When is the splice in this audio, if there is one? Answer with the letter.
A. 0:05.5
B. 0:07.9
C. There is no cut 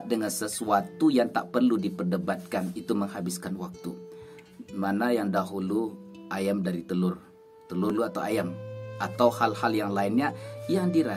B